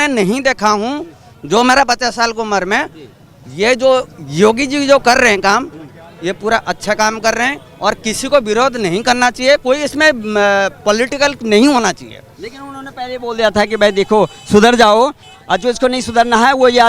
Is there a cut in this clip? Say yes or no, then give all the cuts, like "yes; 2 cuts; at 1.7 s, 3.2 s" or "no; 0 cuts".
no; 0 cuts